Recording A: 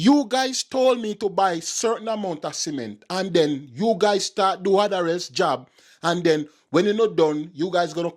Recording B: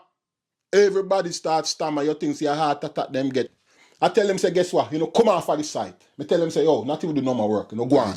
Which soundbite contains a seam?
B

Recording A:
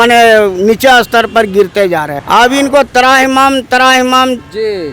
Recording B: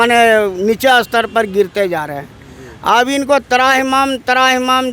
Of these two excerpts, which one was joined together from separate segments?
A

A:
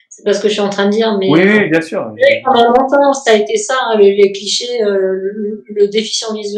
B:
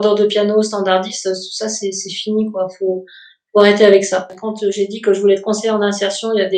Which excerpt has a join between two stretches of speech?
B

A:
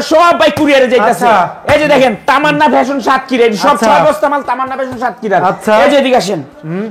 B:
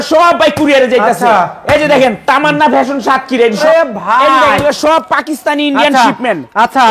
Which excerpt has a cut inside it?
B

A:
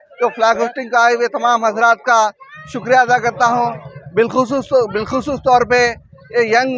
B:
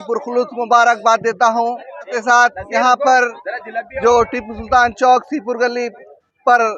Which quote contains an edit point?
B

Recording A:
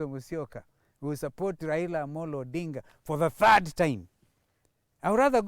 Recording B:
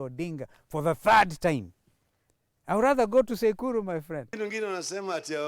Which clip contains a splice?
B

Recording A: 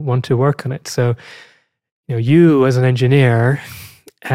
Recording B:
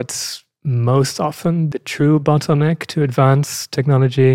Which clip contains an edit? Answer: B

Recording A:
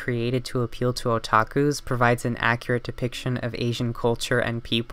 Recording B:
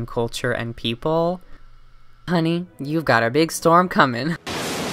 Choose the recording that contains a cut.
B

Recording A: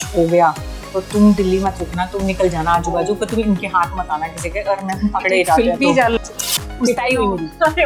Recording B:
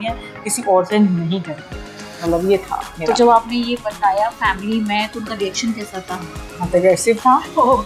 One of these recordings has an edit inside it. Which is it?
A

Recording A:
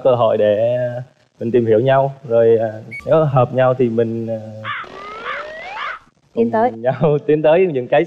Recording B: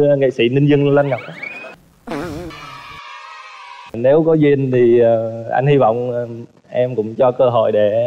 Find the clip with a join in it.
B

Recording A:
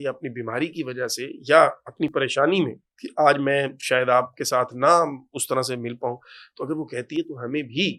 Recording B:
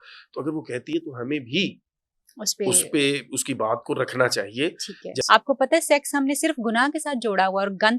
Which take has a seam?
B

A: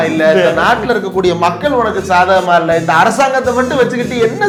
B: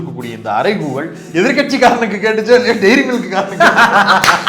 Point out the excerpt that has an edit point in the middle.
B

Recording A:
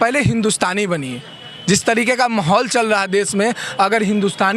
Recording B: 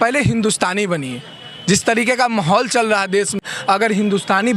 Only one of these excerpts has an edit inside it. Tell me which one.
B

